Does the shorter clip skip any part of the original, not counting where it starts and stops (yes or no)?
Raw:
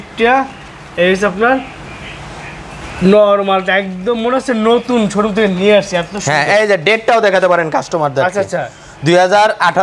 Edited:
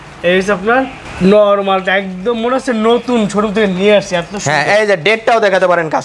yes